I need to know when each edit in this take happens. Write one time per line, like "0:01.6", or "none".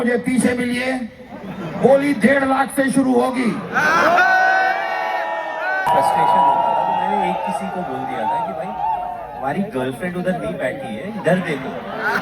0:05.7